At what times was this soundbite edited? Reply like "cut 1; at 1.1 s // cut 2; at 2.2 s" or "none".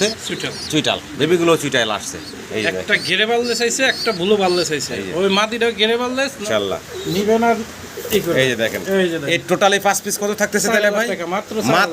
cut 1; at 6.4 s